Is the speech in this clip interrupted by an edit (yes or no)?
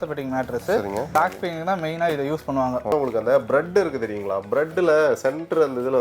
yes